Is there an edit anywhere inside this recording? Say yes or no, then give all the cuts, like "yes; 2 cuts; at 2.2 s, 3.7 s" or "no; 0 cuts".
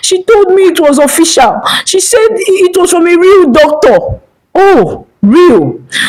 no; 0 cuts